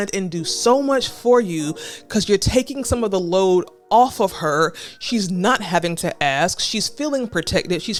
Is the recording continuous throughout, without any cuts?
yes; 0 cuts

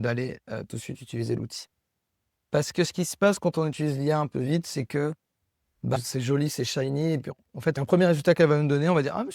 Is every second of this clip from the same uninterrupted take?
no; 1 cut; at 7.8 s

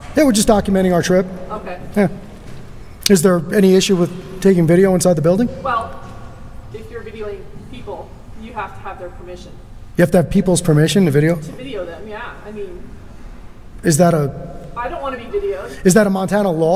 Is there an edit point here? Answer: no; 0 cuts

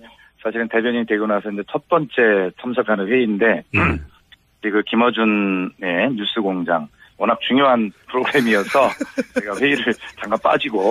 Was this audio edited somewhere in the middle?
no; 0 cuts

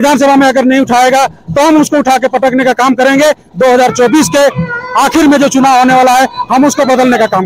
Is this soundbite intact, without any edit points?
yes; 0 cuts

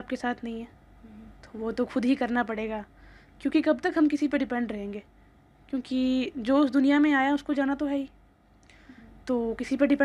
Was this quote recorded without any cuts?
yes; 0 cuts

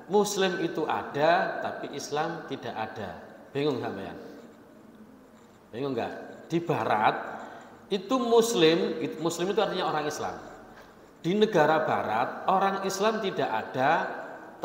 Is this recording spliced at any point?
no; 0 cuts

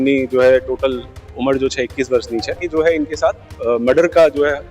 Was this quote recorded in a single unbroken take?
no; 1 cut; at 2.6 s

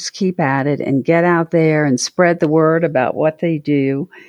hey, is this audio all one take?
yes; 0 cuts

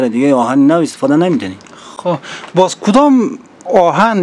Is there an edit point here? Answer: no; 0 cuts

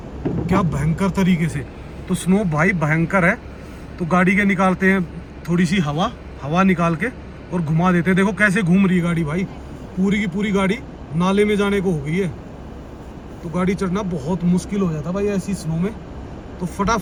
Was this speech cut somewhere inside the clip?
no; 0 cuts

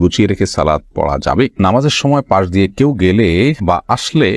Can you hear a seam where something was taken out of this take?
yes; 1 cut; at 1.6 s

